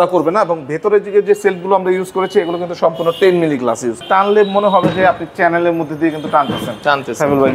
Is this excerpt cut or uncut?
cut